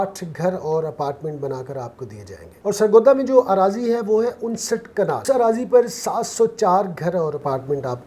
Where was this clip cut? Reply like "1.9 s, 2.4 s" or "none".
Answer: 5.2 s